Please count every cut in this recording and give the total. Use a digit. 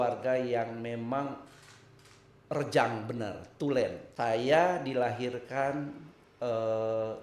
1